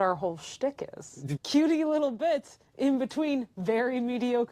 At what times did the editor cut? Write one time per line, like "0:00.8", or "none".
0:01.3